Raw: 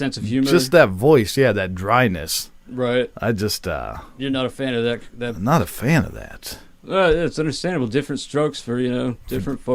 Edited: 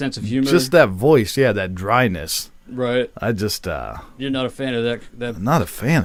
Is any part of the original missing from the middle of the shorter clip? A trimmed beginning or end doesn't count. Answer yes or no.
no